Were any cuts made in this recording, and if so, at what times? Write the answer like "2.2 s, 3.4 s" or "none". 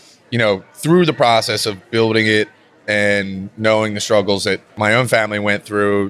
4.8 s